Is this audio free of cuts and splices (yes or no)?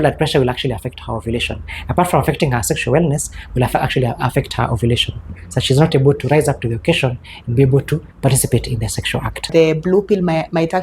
no